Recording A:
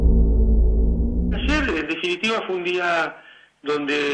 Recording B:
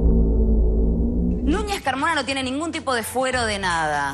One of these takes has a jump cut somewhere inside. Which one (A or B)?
B